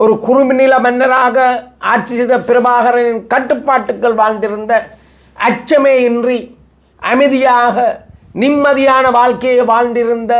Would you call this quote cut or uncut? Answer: uncut